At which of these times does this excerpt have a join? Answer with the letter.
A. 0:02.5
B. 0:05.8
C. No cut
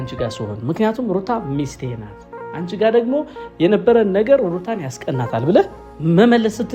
B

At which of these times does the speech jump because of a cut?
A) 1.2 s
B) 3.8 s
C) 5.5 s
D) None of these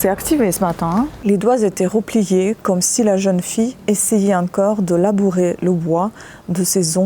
A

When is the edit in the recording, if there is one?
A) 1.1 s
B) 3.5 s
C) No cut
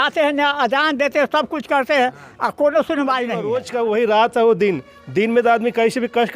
B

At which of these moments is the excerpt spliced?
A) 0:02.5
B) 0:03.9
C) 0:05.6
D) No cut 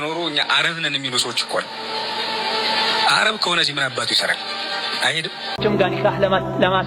C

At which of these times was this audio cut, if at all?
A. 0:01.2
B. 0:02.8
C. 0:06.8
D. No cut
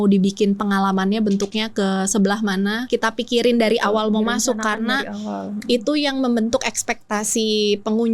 B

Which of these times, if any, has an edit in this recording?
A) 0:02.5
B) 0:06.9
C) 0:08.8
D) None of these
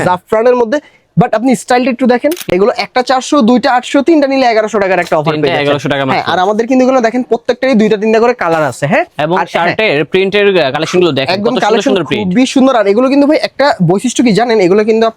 A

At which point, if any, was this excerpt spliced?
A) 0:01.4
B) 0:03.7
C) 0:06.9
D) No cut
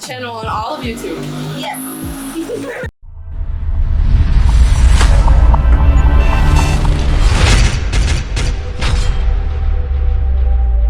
D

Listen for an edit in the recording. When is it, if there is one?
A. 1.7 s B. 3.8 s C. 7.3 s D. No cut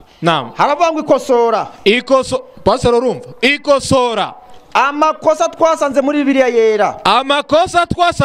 D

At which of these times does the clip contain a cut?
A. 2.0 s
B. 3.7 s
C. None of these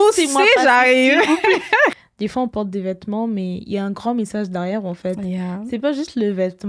A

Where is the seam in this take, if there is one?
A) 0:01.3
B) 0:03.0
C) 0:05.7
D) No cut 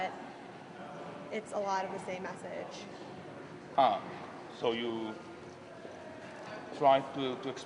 D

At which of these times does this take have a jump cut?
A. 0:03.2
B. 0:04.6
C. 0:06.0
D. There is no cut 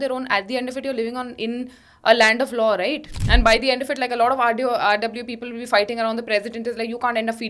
A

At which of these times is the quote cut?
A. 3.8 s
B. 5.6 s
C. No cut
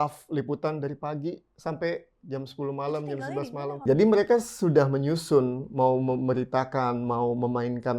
A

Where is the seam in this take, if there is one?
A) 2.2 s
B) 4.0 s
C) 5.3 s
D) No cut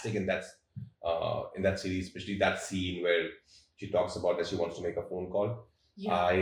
D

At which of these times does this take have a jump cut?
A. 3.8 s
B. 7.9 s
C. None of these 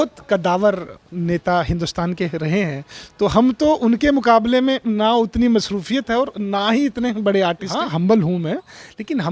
B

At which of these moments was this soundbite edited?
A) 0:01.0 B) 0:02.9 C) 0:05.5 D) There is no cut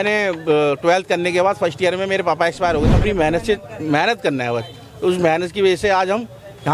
B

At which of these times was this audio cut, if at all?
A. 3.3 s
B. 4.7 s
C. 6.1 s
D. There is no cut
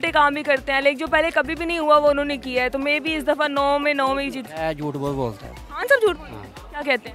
D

